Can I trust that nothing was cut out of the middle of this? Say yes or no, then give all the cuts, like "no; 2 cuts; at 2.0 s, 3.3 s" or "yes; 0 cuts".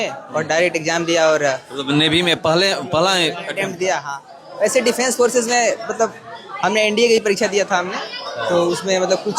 yes; 0 cuts